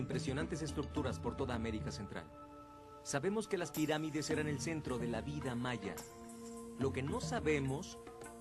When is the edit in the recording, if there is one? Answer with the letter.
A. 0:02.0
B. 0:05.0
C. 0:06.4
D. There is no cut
B